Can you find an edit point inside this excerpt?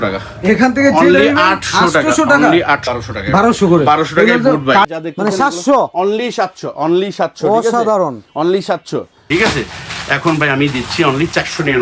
yes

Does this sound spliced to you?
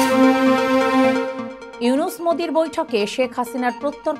yes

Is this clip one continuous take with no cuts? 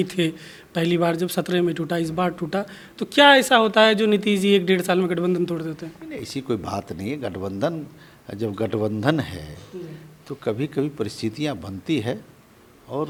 yes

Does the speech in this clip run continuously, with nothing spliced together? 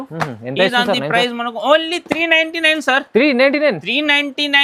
yes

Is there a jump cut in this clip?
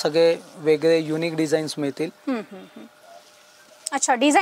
no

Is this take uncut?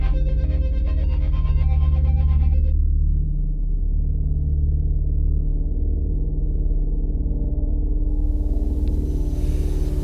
yes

